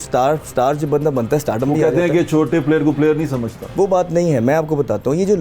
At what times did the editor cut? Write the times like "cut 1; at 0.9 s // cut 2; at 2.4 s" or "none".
none